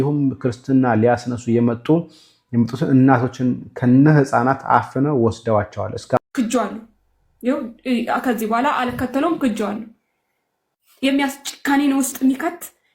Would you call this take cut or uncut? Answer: cut